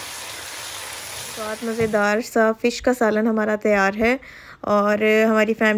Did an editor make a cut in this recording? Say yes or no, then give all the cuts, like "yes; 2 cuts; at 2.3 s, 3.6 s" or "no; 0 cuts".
yes; 1 cut; at 1.6 s